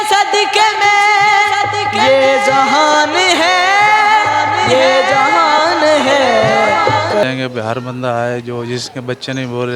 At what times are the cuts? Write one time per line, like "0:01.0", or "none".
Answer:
0:07.2